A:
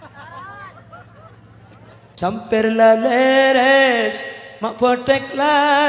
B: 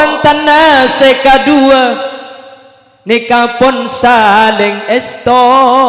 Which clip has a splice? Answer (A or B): A